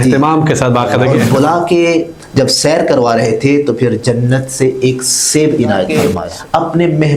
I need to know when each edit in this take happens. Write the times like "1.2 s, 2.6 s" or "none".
1.1 s, 5.9 s